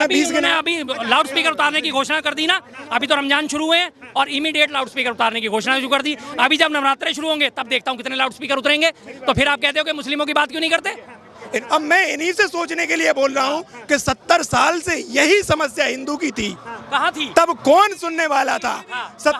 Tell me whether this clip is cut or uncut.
cut